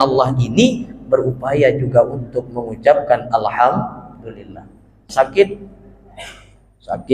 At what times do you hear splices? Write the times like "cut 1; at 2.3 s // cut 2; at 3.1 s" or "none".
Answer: cut 1; at 5.0 s